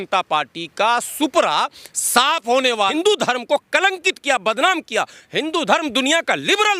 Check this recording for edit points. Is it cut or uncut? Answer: cut